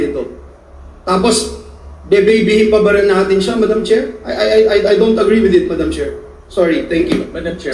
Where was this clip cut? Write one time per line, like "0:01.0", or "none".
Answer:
none